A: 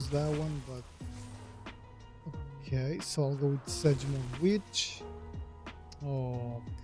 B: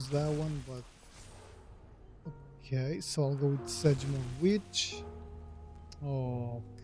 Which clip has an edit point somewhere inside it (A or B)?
A